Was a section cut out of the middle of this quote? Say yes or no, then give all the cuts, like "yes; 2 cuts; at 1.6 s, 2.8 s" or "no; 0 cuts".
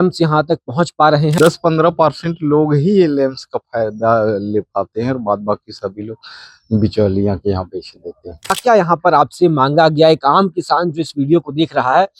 yes; 2 cuts; at 1.3 s, 8.6 s